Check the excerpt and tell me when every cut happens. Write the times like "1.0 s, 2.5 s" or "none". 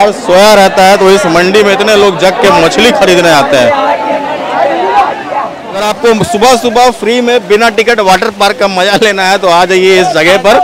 5.8 s